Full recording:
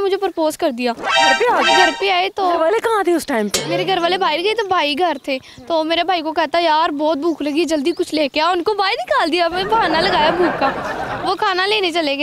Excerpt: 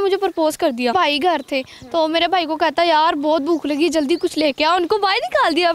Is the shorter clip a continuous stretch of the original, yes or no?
no